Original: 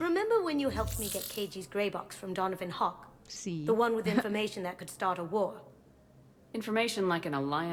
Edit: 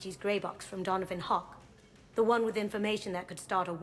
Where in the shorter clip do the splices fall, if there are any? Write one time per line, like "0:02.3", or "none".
none